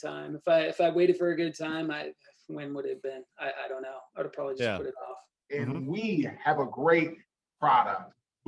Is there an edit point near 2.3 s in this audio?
no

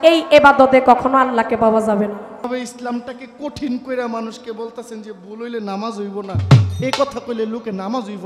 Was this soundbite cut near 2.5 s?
yes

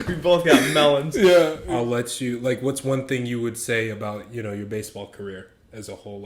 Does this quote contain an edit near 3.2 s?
no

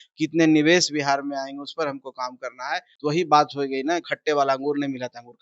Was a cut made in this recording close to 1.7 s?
no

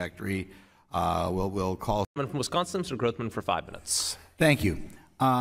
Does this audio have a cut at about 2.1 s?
yes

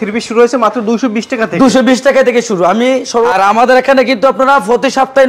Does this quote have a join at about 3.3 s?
yes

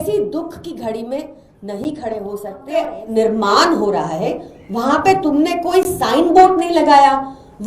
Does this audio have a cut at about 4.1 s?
no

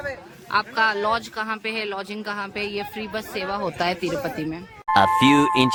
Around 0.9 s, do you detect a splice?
no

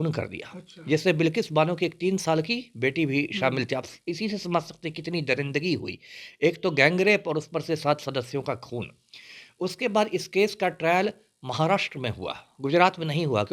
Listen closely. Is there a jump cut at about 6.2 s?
no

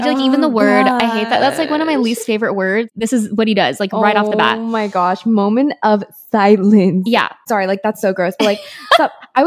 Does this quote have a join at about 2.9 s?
yes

